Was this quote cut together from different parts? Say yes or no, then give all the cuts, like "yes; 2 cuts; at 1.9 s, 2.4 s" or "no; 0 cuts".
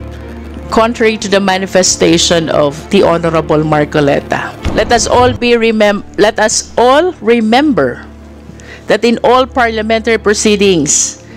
yes; 1 cut; at 4.6 s